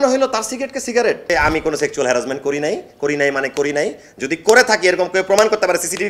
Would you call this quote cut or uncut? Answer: cut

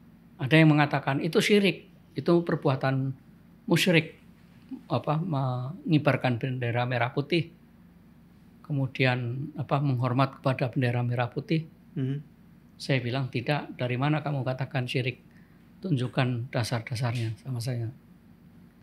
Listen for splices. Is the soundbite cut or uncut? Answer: uncut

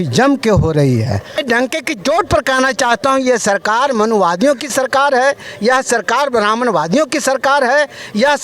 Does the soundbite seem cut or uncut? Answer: cut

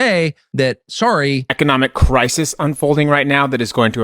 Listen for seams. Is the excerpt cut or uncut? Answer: cut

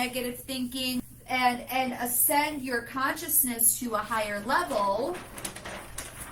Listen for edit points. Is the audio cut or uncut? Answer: cut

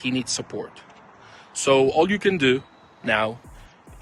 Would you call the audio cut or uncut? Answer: uncut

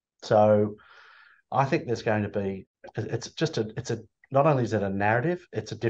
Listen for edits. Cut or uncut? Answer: cut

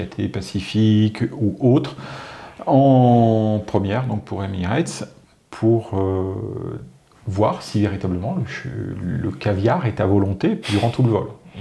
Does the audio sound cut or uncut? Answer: uncut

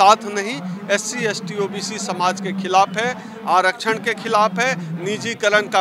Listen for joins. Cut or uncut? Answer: uncut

